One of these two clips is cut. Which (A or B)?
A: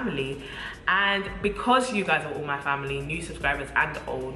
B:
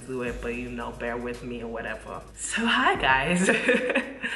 B